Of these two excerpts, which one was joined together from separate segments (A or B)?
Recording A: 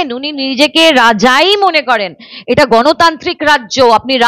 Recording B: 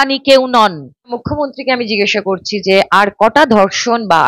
B